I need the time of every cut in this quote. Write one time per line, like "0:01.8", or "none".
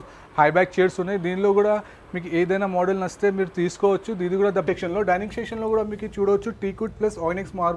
0:04.6